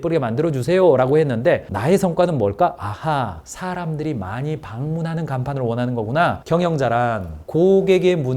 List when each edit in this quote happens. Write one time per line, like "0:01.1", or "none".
0:06.4

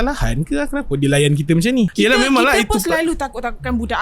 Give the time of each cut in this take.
0:01.9

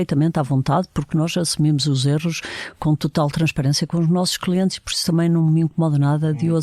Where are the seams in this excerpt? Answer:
none

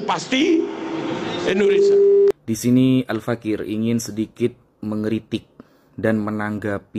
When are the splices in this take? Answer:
0:02.3

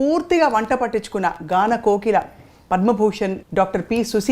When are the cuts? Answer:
0:03.4

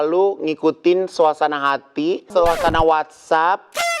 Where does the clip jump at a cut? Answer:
0:02.2

